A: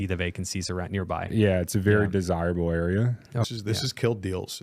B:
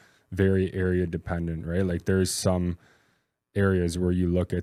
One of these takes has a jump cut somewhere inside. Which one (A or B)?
A